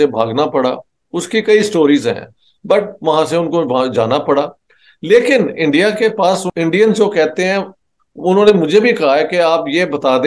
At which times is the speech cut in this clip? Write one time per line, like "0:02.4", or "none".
0:06.5